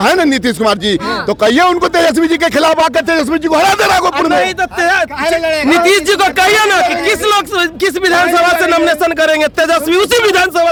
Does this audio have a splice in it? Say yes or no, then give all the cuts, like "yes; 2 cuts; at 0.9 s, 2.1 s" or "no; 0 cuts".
no; 0 cuts